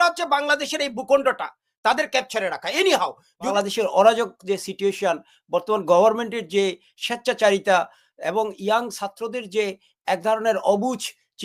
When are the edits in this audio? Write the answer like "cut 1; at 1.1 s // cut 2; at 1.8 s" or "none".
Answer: cut 1; at 3.5 s